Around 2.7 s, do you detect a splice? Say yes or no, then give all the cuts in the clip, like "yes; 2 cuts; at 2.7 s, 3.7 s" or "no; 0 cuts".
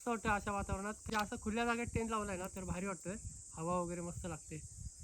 no; 1 cut; at 1.0 s